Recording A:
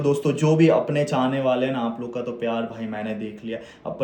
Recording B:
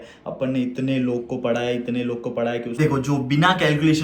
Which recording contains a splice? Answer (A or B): B